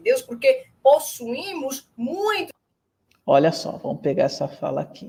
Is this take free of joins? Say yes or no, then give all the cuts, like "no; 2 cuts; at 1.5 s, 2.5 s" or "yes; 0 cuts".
yes; 0 cuts